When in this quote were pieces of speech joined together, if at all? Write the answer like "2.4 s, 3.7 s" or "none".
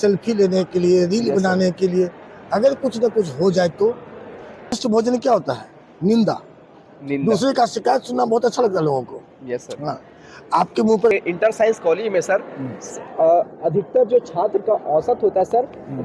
4.8 s, 11.1 s